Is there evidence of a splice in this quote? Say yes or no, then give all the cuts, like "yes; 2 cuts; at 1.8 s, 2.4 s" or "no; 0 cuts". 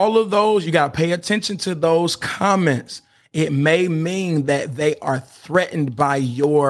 no; 0 cuts